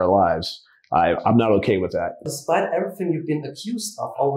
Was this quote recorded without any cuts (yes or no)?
no